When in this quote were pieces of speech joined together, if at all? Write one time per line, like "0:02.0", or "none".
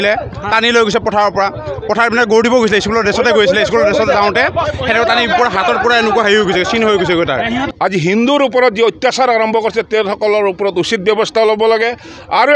0:07.7